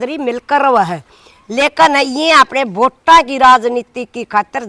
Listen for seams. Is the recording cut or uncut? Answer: uncut